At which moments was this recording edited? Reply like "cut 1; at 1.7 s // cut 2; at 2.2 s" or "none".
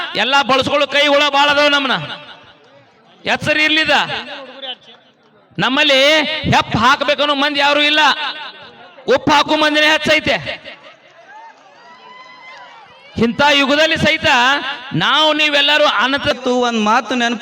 cut 1; at 16.3 s